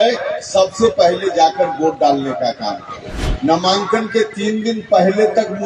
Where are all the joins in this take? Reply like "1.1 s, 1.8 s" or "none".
3.2 s